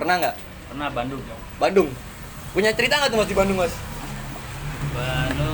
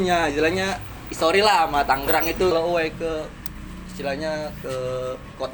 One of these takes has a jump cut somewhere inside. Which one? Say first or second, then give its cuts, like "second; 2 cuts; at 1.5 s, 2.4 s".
second; 1 cut; at 2.5 s